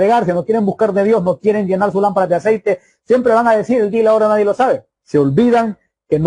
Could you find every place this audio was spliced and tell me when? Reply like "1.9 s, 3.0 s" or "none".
4.9 s